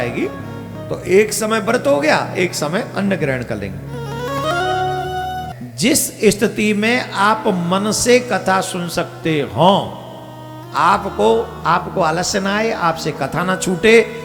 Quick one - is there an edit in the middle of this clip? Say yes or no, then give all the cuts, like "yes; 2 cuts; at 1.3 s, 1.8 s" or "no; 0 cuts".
no; 0 cuts